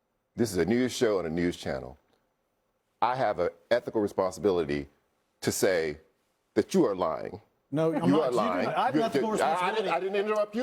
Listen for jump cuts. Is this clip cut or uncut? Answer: uncut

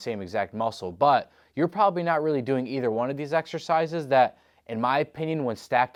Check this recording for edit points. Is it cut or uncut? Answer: uncut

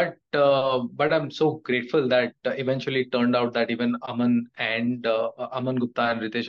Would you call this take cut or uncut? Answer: uncut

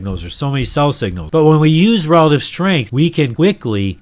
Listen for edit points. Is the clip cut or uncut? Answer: cut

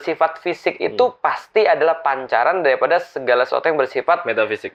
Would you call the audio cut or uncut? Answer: uncut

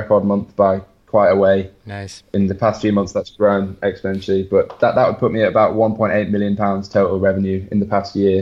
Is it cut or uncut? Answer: uncut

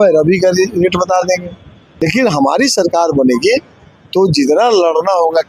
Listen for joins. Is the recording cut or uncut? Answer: cut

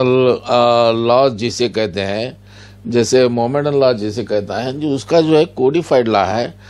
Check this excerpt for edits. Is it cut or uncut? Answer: uncut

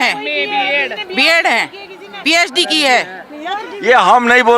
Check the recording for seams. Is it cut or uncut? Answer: uncut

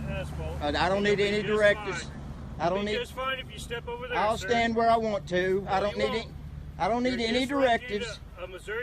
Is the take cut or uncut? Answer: cut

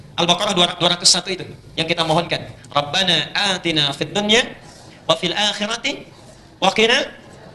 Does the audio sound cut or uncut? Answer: uncut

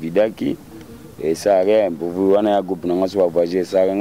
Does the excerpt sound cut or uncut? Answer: uncut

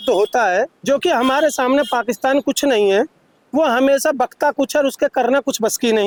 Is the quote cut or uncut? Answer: uncut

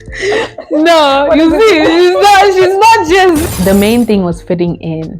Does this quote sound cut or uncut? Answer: cut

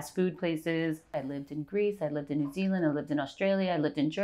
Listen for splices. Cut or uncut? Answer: cut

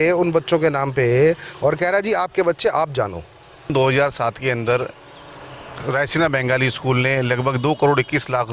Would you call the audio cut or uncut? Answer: cut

